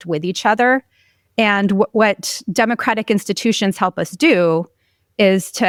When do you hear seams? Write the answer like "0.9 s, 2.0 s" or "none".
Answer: none